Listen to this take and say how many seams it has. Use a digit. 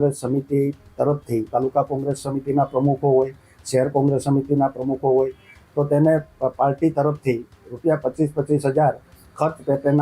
1